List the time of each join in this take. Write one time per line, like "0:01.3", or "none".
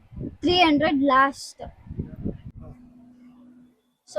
0:02.5